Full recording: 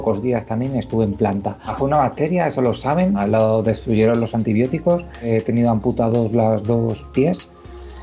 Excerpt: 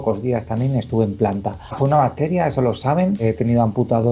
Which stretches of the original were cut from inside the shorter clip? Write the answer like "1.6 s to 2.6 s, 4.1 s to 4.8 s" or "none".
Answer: 3.2 s to 5.2 s

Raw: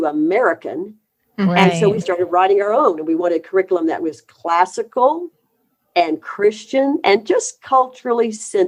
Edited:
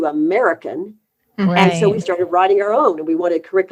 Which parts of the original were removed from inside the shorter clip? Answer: none

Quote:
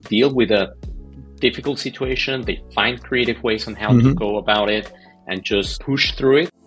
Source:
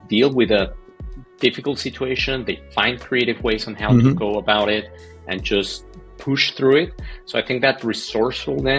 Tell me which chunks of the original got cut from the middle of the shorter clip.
5.8 s to 6.1 s

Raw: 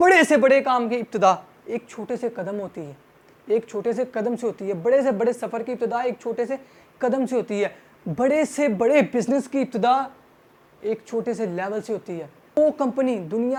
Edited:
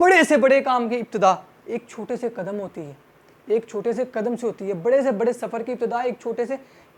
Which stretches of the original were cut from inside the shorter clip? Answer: none

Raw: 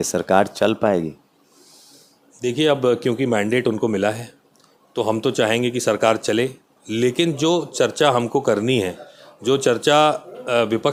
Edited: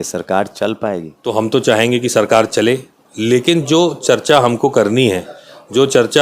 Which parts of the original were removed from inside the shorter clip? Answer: 1.1 s to 4.8 s

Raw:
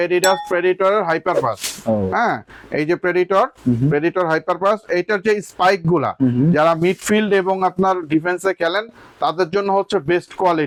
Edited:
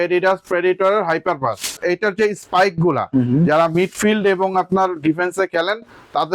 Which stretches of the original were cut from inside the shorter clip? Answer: 1.8 s to 4.8 s

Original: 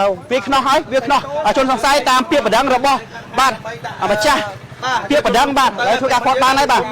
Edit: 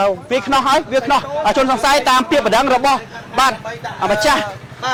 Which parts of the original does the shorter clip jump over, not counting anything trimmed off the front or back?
none

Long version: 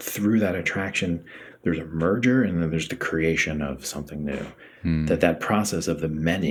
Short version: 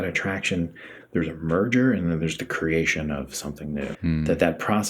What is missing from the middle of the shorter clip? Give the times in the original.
4.5 s to 4.8 s

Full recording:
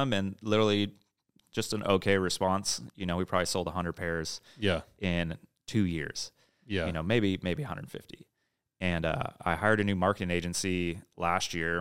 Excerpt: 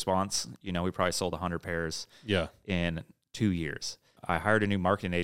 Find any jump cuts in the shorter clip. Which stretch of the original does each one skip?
6.5 s to 9.3 s

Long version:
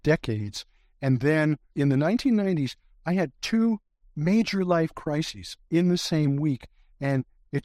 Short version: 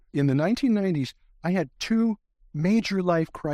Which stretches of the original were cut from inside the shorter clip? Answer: none

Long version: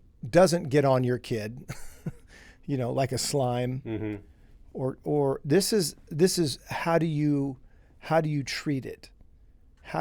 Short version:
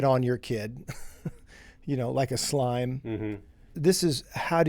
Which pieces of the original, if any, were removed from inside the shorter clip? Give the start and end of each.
4.5 s to 6.0 s

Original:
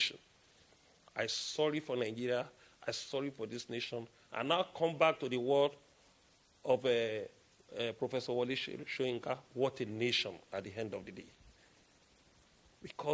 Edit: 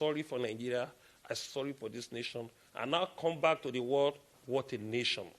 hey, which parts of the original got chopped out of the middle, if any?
5.9 s to 9.4 s

